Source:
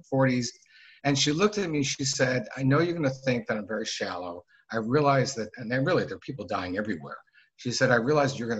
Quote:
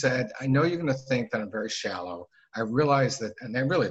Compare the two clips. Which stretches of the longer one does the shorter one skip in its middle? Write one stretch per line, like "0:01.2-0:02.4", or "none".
none